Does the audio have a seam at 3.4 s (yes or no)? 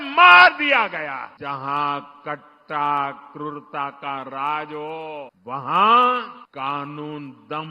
no